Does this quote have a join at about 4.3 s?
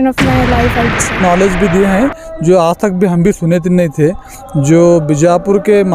no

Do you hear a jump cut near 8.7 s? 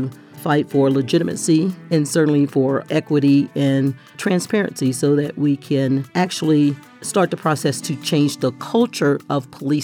no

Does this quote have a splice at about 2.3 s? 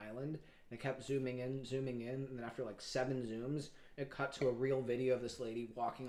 no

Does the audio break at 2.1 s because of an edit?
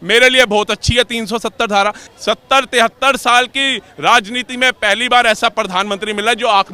yes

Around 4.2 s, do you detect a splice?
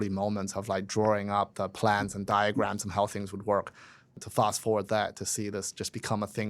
yes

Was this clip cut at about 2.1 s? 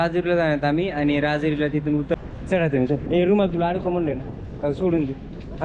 yes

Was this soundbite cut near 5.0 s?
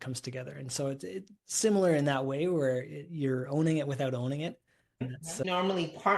yes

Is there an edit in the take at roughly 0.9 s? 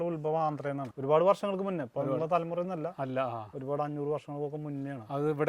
yes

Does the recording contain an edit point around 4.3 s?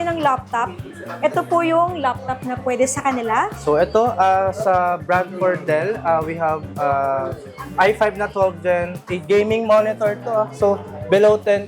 no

